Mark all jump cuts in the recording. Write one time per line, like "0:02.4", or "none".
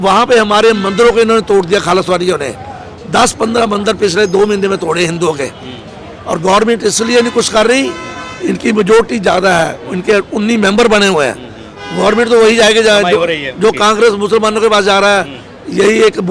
none